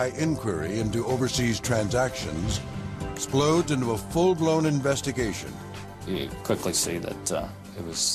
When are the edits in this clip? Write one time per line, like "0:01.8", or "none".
none